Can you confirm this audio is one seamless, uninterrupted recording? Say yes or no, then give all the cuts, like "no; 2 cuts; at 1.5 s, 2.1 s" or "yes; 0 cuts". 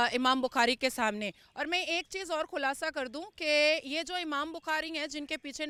yes; 0 cuts